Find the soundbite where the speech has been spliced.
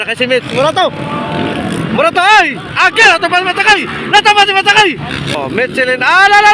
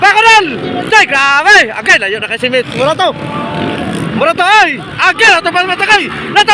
first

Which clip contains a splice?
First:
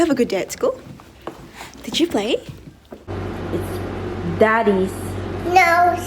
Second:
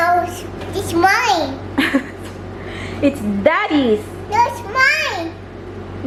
first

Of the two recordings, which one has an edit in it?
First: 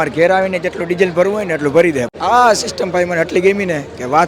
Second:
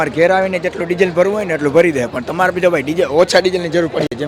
first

